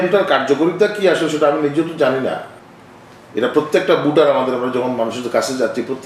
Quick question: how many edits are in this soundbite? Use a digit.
1